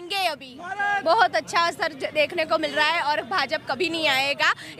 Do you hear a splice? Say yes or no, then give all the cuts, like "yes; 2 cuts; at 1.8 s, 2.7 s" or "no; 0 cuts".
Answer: yes; 1 cut; at 1.0 s